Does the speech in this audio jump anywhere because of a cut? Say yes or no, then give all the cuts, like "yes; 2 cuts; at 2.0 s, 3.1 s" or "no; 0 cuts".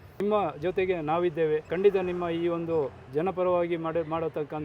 yes; 2 cuts; at 1.7 s, 3.0 s